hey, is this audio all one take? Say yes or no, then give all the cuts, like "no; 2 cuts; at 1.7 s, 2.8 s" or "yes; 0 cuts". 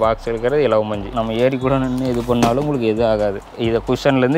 no; 2 cuts; at 1.1 s, 3.5 s